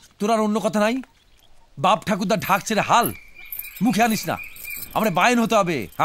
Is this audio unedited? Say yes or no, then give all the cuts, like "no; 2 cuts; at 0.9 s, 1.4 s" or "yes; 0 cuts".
yes; 0 cuts